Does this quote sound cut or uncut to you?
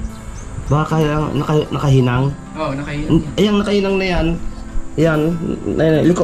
uncut